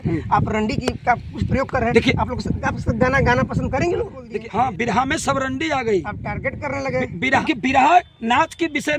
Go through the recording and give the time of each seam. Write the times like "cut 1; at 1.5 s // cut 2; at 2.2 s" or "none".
cut 1; at 4.2 s // cut 2; at 7.4 s